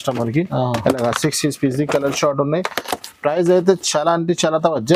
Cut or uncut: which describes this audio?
uncut